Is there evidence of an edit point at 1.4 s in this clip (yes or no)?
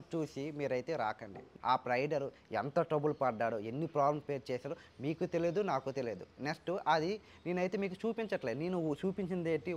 yes